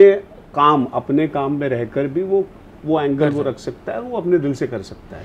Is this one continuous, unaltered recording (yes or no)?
yes